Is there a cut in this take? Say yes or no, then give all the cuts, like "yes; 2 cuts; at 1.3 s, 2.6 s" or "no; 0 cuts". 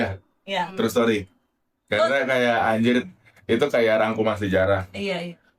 no; 0 cuts